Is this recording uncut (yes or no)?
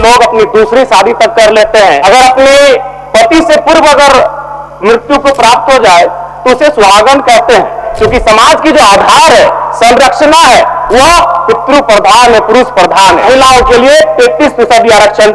no